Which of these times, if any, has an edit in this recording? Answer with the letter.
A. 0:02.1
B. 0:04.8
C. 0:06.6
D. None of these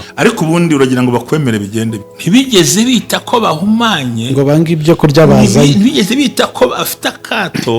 A